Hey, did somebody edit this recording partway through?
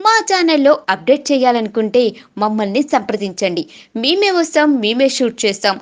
no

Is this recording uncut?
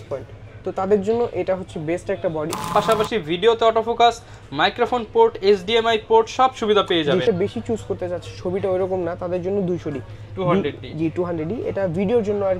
no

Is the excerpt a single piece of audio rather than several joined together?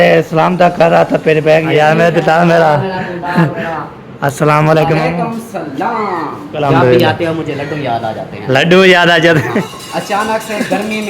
no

